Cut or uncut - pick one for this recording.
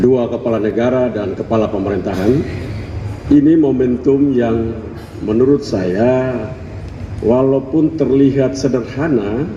cut